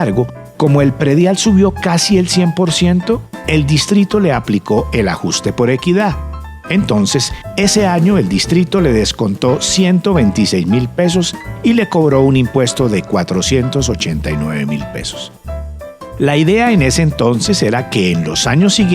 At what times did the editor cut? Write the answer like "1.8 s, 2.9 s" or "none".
10.3 s